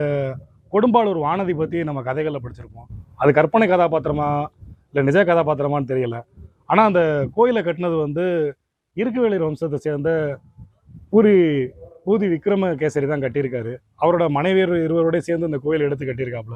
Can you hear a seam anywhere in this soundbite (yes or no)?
no